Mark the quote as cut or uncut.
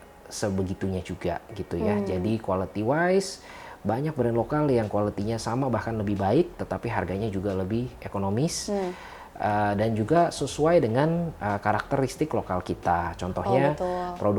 uncut